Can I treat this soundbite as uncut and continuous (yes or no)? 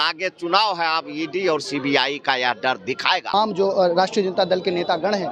no